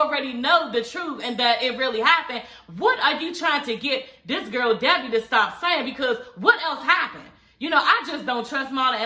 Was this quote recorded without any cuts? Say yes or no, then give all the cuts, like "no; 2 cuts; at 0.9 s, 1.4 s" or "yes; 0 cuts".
yes; 0 cuts